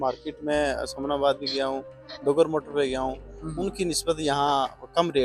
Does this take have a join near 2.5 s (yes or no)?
no